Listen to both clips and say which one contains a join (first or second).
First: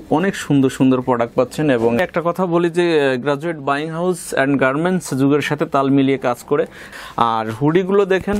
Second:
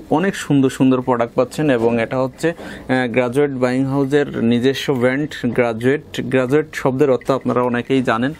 first